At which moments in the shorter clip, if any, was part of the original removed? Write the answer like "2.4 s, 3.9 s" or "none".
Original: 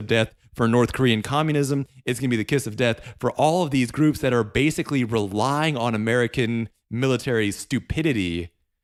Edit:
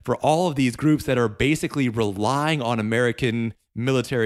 none